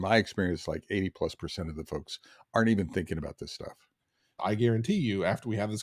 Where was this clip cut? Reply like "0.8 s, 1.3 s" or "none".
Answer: 4.4 s